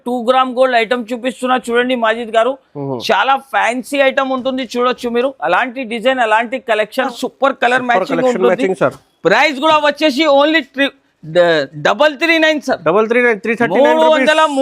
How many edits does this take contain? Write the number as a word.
one